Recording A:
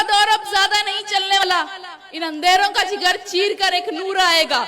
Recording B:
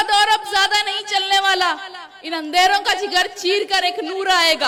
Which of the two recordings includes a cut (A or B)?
A